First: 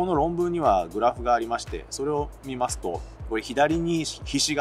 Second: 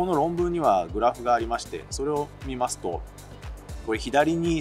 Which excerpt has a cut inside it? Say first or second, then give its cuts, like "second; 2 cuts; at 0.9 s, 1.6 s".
first; 1 cut; at 3.1 s